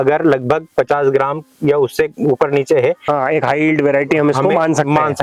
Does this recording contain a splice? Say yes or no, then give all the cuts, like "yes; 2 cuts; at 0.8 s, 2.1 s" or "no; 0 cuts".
no; 0 cuts